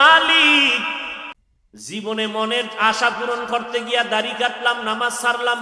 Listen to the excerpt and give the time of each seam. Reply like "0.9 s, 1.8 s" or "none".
1.3 s